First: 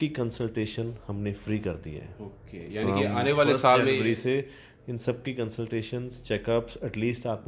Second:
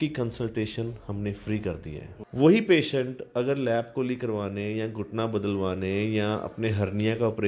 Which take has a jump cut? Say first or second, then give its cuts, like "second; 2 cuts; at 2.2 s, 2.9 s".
second; 1 cut; at 2.1 s